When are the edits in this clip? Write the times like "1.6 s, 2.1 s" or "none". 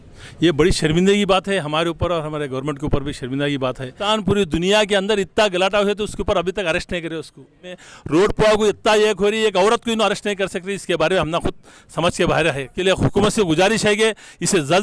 4.0 s, 7.8 s, 12.7 s

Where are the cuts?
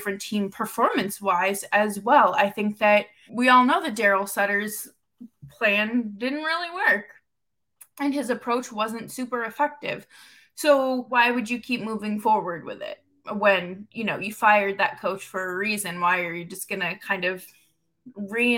3.2 s, 11.1 s

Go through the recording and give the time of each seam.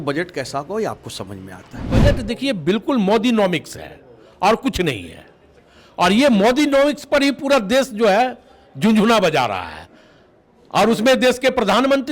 2.0 s

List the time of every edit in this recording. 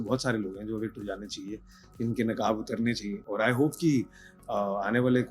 none

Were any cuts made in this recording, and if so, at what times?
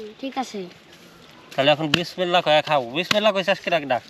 none

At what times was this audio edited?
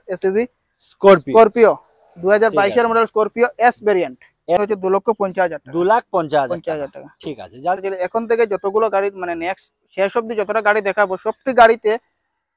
4.6 s, 7.8 s

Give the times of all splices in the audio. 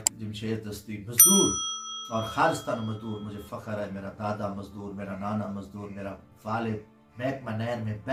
none

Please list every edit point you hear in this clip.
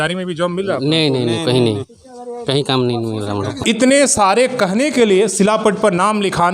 3.6 s

